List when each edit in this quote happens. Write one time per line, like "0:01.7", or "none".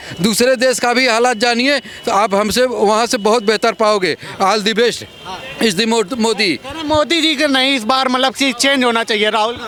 none

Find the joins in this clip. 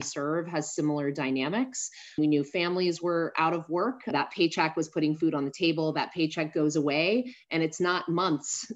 0:02.2
0:04.1

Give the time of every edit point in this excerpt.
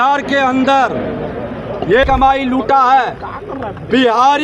0:02.1

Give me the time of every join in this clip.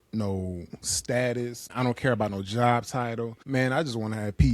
0:01.7
0:03.4

